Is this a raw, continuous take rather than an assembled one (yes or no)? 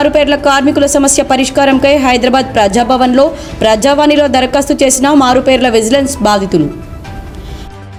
yes